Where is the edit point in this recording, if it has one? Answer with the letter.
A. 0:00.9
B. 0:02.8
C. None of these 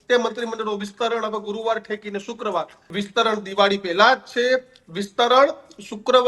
B